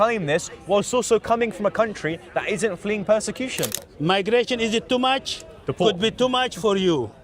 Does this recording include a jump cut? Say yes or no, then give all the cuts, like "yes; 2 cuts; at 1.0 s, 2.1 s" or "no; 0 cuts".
yes; 1 cut; at 3.8 s